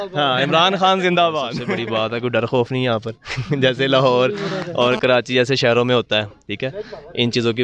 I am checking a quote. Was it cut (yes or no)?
yes